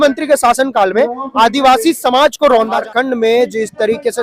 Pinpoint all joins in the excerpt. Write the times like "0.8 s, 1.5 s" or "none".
2.7 s